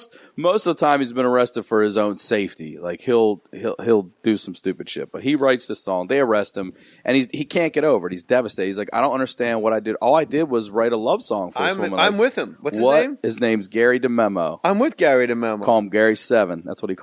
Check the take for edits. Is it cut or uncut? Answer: uncut